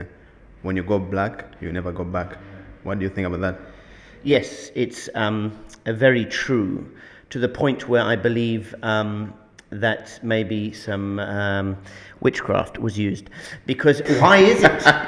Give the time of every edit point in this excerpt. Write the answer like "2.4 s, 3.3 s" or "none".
none

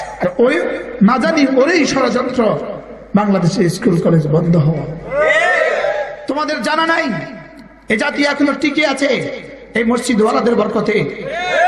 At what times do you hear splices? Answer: 6.2 s

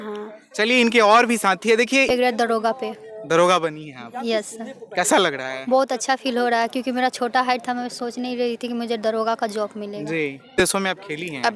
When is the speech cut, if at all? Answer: 2.1 s, 10.6 s

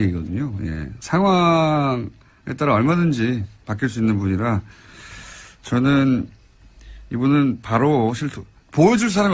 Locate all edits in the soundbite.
none

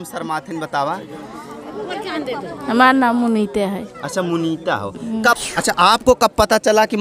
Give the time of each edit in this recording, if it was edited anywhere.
5.3 s

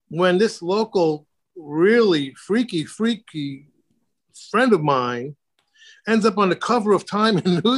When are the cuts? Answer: none

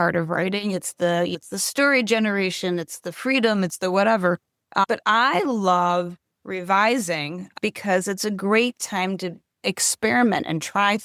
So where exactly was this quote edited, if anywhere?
none

